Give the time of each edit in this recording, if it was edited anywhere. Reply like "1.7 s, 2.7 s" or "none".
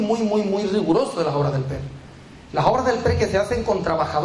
none